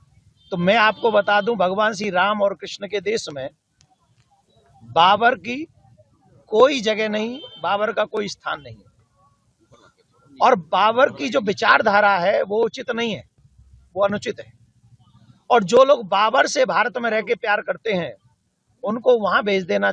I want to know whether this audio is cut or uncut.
uncut